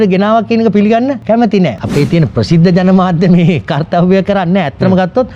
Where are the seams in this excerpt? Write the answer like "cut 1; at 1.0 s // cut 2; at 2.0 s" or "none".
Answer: cut 1; at 1.7 s